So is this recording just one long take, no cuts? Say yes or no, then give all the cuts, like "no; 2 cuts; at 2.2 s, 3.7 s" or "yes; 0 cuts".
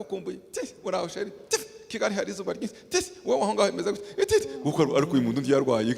yes; 0 cuts